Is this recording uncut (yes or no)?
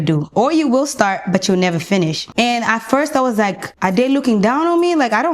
no